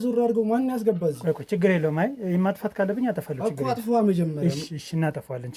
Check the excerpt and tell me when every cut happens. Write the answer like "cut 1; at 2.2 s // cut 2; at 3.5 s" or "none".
none